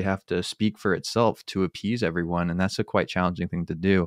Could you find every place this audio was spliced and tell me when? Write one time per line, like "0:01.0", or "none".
none